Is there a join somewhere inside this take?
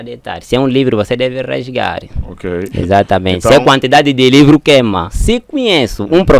yes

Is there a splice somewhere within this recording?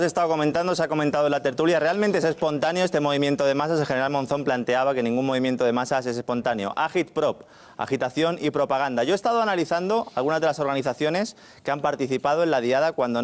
no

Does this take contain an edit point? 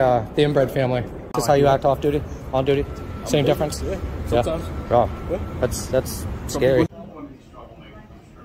yes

